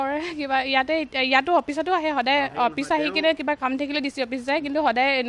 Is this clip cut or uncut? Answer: uncut